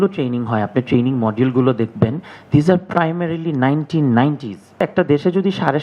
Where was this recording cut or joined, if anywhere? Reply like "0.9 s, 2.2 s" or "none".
4.8 s